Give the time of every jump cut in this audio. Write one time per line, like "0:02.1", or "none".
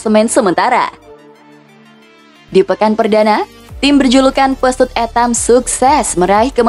none